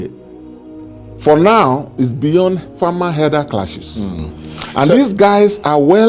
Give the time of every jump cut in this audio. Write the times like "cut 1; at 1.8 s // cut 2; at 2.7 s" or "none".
none